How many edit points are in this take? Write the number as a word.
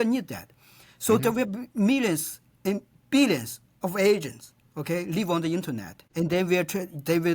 one